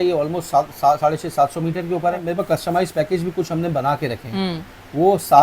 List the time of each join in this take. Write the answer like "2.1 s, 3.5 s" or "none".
2.3 s